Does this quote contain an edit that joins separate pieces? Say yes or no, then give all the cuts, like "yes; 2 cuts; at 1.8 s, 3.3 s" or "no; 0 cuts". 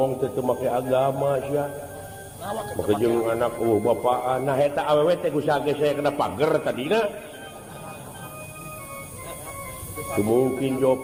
no; 0 cuts